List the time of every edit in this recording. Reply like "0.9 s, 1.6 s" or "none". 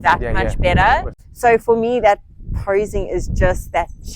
1.2 s